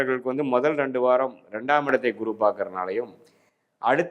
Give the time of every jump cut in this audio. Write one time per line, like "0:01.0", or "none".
none